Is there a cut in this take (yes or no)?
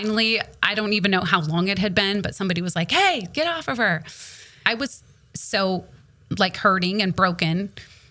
yes